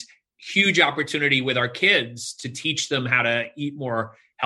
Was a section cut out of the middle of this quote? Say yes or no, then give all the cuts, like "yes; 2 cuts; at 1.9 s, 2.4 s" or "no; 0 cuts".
no; 0 cuts